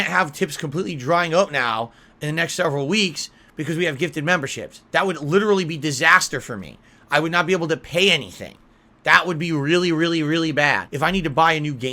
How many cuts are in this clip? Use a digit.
1